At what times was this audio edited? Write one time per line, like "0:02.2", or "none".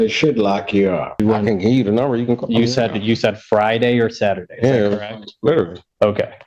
0:01.2